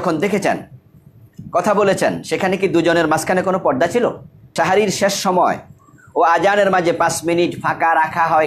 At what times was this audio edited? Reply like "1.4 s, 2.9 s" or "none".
4.5 s